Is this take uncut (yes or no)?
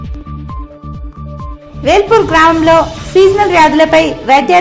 yes